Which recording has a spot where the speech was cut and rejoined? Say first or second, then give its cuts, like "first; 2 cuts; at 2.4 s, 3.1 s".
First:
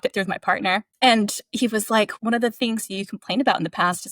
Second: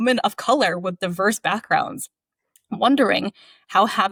first; 2 cuts; at 0.9 s, 2.1 s